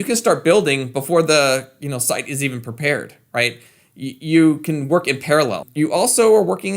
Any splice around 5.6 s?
yes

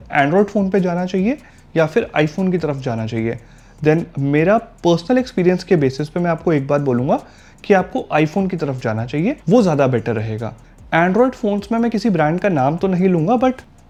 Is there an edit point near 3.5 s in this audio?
no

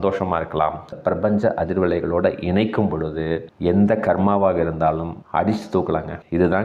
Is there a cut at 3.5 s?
no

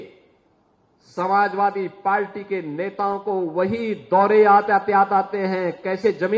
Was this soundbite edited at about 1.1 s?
no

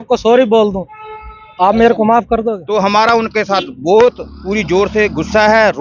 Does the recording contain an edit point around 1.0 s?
no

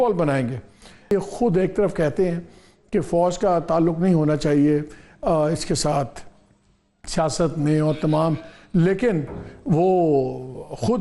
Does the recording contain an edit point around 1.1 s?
yes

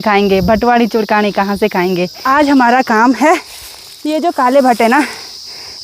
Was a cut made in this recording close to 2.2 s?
yes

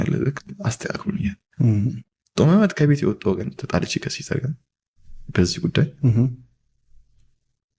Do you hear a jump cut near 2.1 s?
no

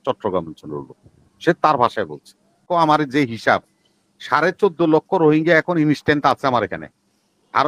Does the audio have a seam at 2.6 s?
yes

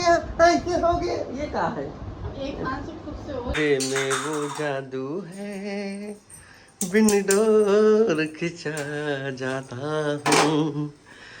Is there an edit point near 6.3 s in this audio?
no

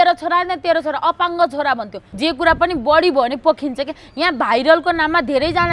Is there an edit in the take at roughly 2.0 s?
yes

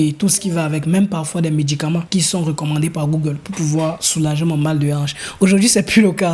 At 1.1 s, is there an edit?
no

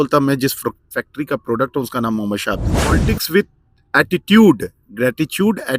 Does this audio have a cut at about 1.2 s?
no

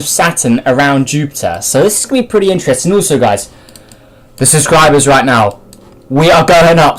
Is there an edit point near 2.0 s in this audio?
yes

